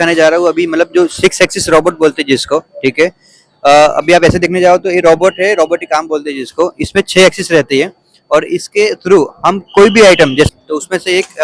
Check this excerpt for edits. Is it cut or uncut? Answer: cut